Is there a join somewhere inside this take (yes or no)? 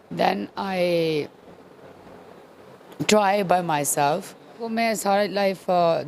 yes